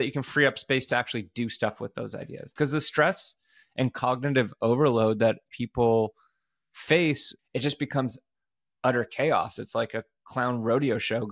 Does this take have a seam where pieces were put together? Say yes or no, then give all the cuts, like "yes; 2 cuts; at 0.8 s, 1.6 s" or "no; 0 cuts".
yes; 2 cuts; at 2.5 s, 7.3 s